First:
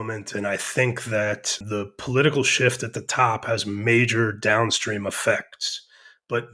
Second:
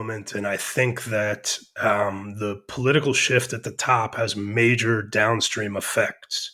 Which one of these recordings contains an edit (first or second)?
first